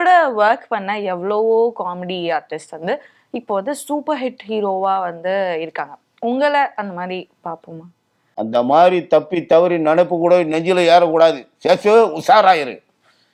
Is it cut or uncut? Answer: uncut